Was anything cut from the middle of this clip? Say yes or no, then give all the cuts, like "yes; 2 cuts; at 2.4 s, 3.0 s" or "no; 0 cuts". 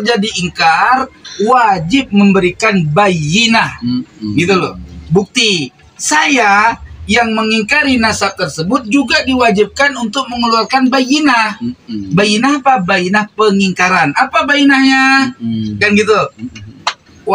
yes; 1 cut; at 1.2 s